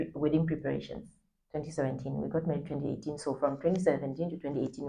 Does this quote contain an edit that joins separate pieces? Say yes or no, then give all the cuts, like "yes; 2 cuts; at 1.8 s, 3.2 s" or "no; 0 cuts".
no; 0 cuts